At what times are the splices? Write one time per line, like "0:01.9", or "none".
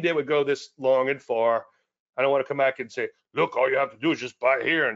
none